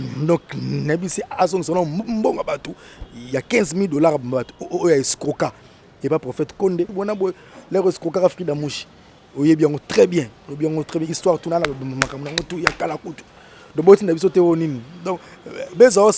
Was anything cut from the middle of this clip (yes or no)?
yes